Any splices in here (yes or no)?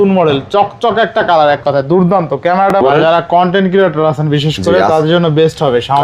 yes